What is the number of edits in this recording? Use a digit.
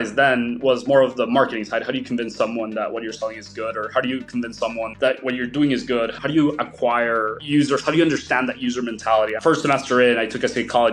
2